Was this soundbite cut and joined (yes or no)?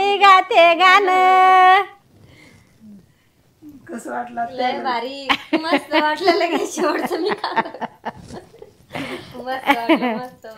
no